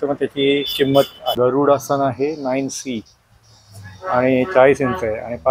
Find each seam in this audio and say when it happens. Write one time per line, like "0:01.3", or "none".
0:01.3